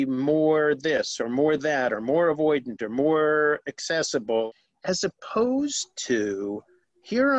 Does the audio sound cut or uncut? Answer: cut